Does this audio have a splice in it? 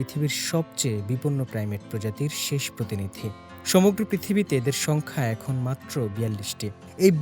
no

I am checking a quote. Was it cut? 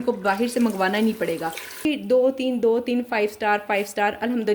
yes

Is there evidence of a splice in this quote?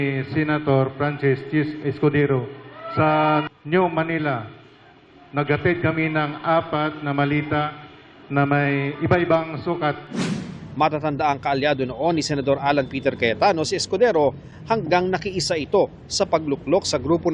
no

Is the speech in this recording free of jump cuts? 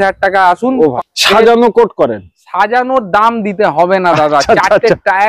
no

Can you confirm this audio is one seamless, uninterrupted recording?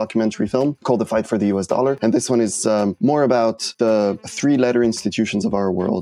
no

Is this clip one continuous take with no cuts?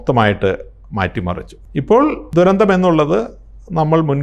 yes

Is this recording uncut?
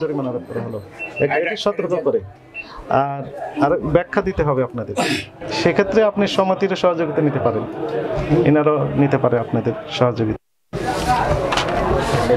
yes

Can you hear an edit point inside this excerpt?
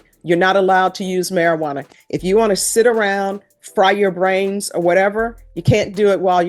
no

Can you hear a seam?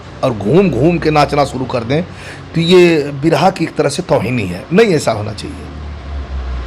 no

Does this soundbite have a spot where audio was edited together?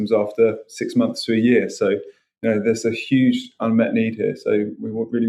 no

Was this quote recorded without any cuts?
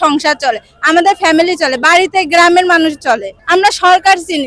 no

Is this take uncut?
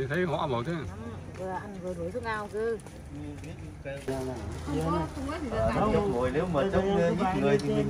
no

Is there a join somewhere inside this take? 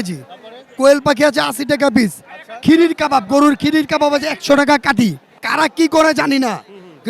no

